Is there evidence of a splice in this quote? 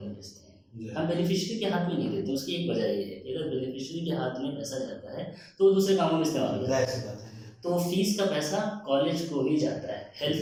no; 0 cuts

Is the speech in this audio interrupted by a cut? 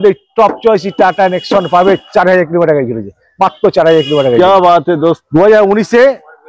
yes; 1 cut; at 5.2 s

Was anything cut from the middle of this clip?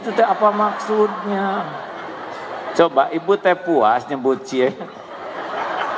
no; 0 cuts

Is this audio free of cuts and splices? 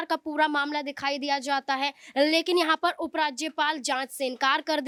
yes; 0 cuts

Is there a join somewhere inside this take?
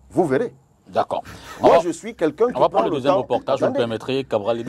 no; 0 cuts

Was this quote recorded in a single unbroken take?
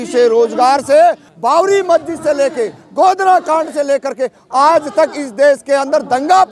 no; 1 cut; at 1.3 s

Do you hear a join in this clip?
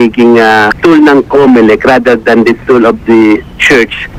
no; 0 cuts

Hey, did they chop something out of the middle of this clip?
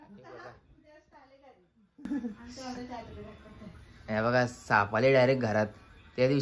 no; 0 cuts

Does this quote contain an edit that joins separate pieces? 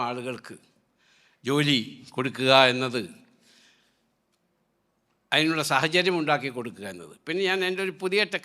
no; 0 cuts

